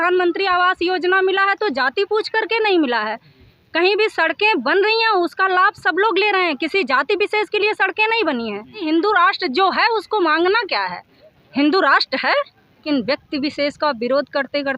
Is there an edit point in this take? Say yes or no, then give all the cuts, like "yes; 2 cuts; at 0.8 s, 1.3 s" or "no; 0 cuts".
yes; 2 cuts; at 8.8 s, 12.8 s